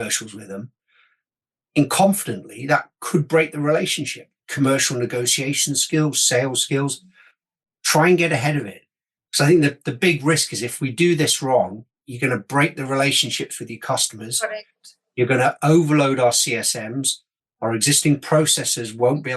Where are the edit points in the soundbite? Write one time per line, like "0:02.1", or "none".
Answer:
0:04.4